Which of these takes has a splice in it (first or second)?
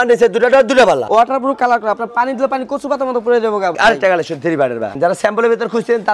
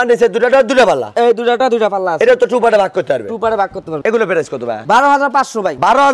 first